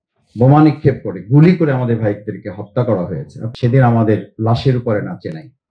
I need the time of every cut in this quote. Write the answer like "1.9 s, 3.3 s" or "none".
3.3 s